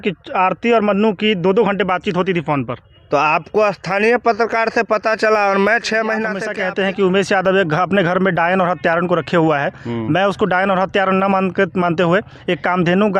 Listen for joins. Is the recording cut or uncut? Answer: cut